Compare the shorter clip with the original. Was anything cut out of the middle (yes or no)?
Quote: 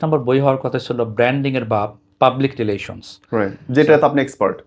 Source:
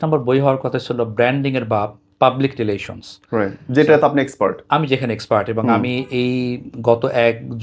no